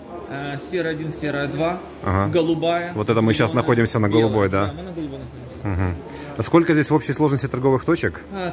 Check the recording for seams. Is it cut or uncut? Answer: uncut